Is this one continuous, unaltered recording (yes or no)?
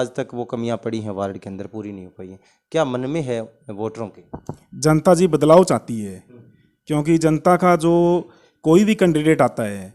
yes